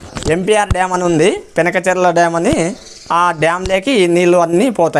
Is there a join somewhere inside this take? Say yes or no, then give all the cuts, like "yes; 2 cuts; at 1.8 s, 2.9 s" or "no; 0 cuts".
no; 0 cuts